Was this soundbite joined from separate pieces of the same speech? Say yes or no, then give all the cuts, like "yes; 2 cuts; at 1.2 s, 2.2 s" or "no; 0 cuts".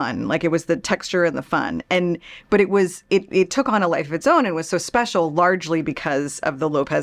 no; 0 cuts